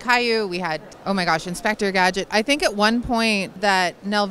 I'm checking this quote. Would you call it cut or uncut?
cut